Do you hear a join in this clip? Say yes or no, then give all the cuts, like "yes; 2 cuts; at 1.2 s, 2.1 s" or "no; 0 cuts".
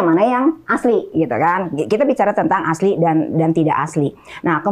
no; 0 cuts